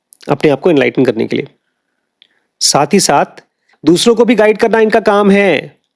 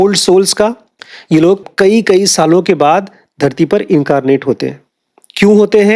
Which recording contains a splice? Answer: second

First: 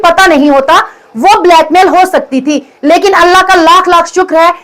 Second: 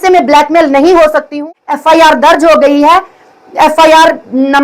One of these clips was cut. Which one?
second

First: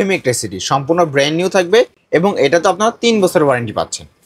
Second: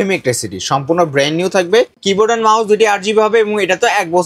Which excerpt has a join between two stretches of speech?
second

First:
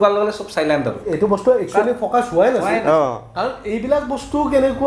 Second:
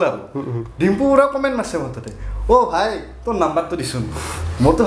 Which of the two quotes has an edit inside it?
first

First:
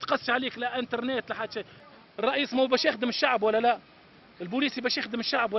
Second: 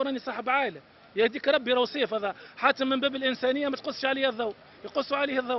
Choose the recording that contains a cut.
first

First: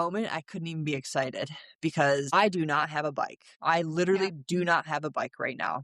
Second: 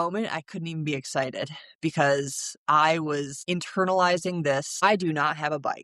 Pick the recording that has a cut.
first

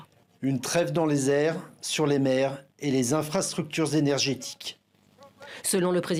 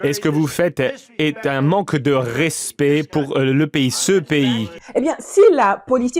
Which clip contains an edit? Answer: second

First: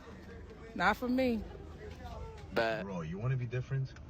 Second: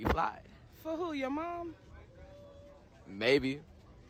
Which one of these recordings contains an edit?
first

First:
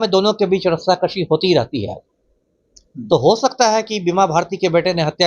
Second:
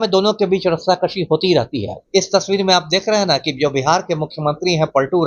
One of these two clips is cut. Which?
second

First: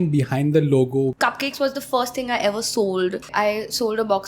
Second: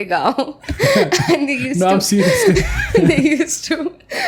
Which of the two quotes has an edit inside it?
first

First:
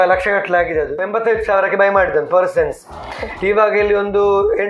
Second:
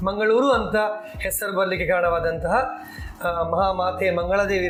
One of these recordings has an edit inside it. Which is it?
first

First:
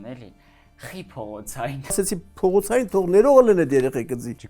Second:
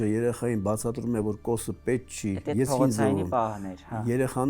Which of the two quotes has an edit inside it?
first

